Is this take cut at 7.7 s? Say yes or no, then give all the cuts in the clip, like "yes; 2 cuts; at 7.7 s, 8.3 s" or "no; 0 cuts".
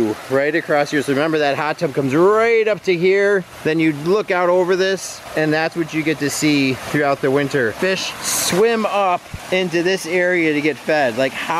yes; 1 cut; at 7.7 s